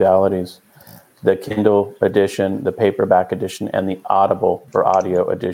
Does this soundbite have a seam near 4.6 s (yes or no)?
yes